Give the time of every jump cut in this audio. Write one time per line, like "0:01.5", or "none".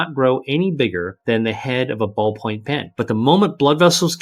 0:01.1
0:02.9